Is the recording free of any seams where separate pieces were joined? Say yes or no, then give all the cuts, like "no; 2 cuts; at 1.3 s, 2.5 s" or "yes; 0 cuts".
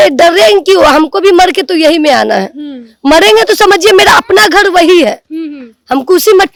yes; 0 cuts